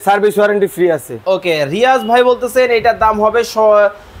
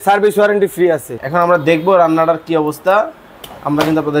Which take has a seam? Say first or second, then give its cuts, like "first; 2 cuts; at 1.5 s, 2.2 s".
second; 1 cut; at 1.1 s